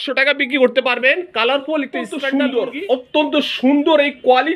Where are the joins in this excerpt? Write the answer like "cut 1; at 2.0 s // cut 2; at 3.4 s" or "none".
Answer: cut 1; at 2.2 s